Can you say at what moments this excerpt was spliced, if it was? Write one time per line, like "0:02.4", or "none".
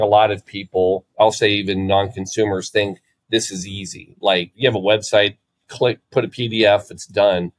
0:01.1
0:04.5

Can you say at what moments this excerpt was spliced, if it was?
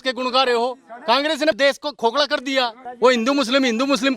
0:02.8

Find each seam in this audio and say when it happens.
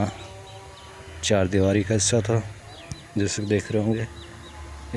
none

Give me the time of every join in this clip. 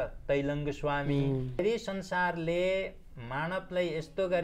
0:01.6

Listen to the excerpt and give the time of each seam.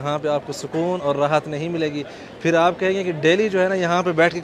none

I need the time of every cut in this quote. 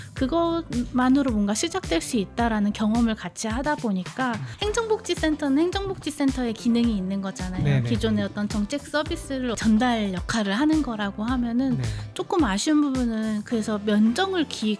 0:04.5
0:09.6

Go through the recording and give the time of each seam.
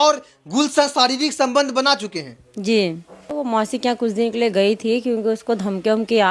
0:03.3

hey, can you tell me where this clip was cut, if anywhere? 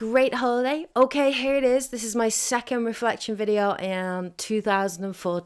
0:01.1

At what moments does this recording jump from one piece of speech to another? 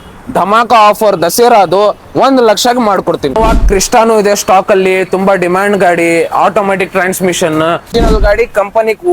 0:03.3
0:07.9

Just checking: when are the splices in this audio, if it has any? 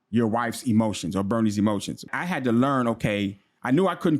0:02.1

